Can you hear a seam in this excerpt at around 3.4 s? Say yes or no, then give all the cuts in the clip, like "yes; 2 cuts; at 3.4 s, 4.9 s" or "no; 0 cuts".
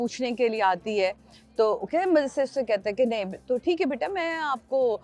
no; 0 cuts